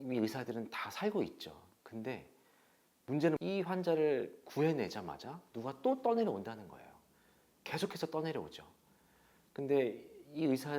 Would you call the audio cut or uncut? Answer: cut